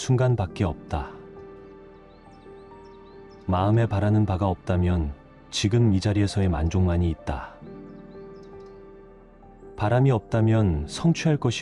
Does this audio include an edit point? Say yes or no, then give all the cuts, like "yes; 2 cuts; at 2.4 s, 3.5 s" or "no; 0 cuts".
yes; 4 cuts; at 1.1 s, 3.5 s, 7.6 s, 9.8 s